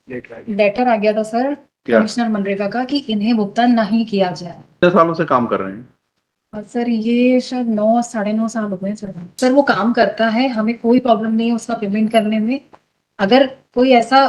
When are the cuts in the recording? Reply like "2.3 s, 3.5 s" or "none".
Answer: 4.8 s, 9.2 s